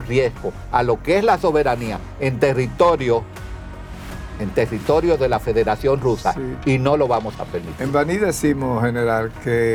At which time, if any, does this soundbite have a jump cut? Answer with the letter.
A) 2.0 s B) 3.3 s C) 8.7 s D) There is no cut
D